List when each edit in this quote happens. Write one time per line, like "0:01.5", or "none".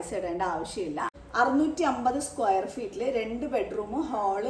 0:01.1